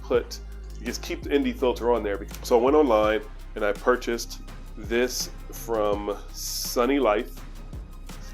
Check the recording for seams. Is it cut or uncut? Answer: cut